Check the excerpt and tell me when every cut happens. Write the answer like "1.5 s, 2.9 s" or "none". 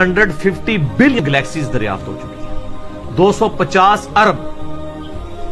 1.2 s